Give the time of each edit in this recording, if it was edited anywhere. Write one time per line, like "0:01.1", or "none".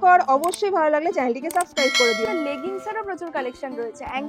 0:02.3